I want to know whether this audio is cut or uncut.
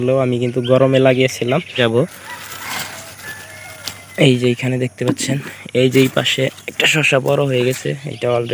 cut